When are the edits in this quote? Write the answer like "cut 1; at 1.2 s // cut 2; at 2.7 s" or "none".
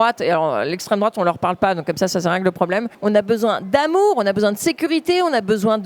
cut 1; at 2.9 s